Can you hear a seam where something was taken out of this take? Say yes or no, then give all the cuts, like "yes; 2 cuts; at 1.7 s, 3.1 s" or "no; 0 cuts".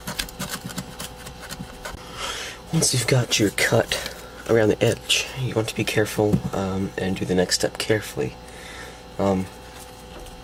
no; 0 cuts